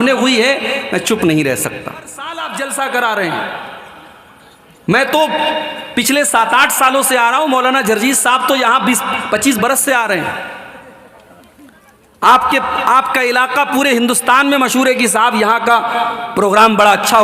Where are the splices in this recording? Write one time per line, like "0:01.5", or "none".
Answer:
0:02.4